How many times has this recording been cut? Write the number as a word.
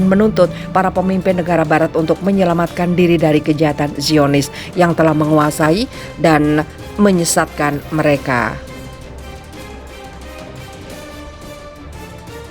two